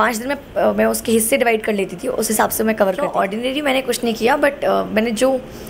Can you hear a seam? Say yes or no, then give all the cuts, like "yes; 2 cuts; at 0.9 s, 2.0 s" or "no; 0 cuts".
yes; 1 cut; at 3.1 s